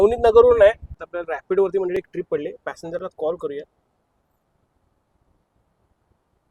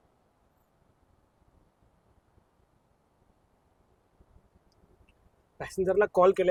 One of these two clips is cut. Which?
first; 1 cut; at 0.9 s

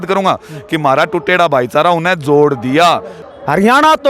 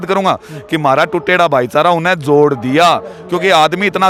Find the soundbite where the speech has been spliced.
first; 1 cut; at 3.1 s

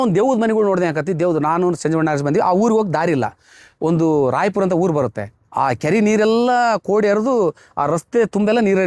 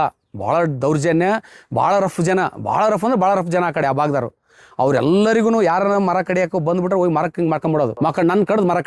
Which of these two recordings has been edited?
second; 1 cut; at 7.9 s

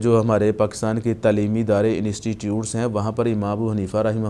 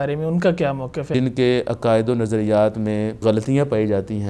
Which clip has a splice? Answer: second; 2 cuts; at 1.1 s, 3.2 s

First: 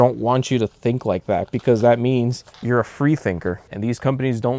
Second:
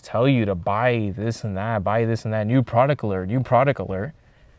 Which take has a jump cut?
first; 2 cuts; at 2.5 s, 3.7 s

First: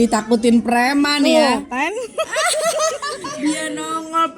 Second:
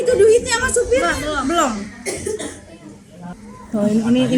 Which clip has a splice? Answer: first; 1 cut; at 3.2 s

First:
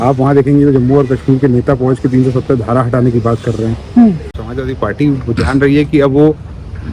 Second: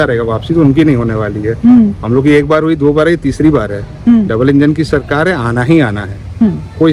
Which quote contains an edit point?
first; 1 cut; at 4.4 s

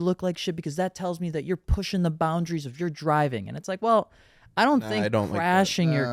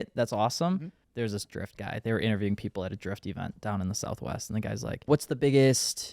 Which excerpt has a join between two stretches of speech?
second; 2 cuts; at 1.0 s, 5.1 s

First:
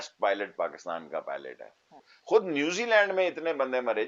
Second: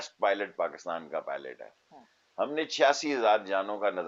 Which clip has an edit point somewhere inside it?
first; 1 cut; at 2.1 s

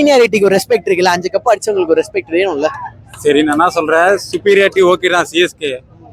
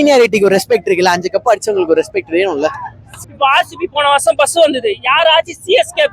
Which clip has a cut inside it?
second; 1 cut; at 3.1 s

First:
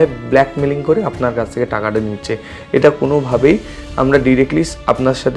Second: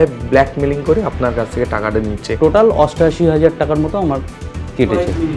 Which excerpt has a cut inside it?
second; 1 cut; at 2.3 s

